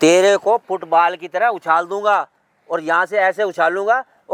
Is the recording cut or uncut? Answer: uncut